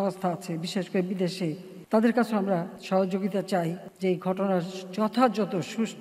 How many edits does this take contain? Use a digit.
3